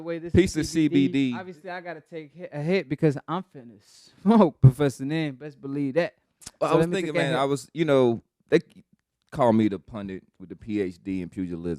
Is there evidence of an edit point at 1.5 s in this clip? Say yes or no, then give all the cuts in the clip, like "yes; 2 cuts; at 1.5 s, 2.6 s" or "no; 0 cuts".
yes; 1 cut; at 1.5 s